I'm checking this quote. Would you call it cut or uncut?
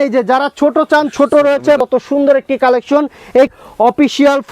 cut